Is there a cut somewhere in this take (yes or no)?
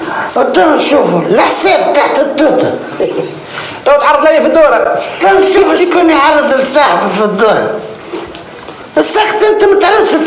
no